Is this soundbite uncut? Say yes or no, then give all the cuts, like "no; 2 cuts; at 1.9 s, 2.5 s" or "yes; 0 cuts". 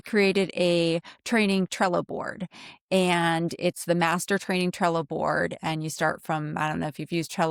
yes; 0 cuts